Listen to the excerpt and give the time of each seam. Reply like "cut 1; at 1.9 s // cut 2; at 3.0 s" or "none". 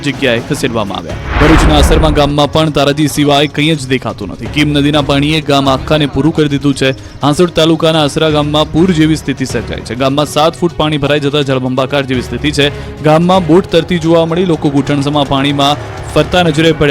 cut 1; at 10.7 s